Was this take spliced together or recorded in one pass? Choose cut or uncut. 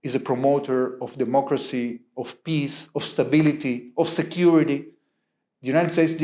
uncut